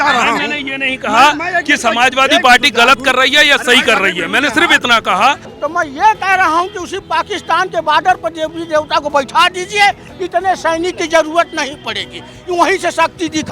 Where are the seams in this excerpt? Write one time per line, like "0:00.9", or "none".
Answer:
0:05.5